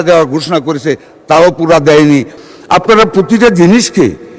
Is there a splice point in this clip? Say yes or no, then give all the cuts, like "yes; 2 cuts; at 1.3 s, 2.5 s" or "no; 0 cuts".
yes; 1 cut; at 2.3 s